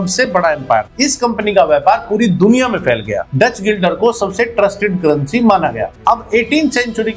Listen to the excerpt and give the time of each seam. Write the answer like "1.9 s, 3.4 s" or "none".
0.9 s, 3.3 s, 5.9 s